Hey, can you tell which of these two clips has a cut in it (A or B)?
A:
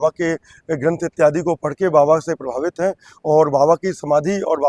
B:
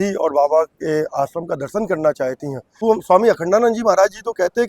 B